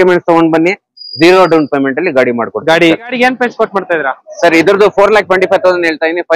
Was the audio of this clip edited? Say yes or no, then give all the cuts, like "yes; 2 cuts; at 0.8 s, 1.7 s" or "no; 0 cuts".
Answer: yes; 1 cut; at 3.1 s